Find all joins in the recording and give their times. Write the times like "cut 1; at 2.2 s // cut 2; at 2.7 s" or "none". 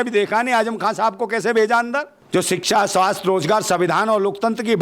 cut 1; at 2.2 s